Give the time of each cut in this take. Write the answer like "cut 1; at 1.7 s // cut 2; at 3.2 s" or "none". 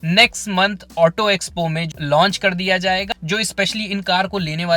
cut 1; at 1.9 s // cut 2; at 3.0 s